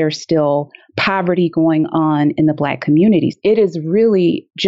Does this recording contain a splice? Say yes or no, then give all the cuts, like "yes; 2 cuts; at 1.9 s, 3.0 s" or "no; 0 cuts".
yes; 1 cut; at 3.3 s